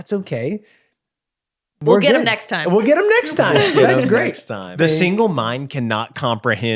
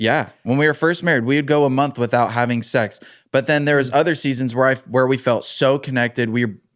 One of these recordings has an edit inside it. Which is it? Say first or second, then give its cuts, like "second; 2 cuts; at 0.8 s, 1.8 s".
first; 1 cut; at 4.7 s